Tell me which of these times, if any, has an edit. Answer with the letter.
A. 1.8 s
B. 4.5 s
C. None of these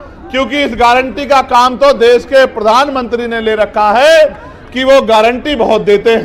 C